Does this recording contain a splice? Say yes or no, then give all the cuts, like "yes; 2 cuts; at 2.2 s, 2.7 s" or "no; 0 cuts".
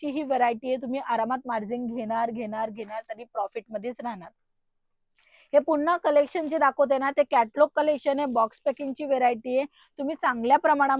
no; 0 cuts